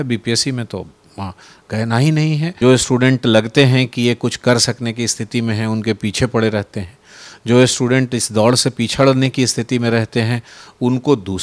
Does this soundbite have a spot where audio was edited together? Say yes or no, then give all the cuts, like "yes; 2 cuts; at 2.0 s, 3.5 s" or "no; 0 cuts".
yes; 1 cut; at 2.5 s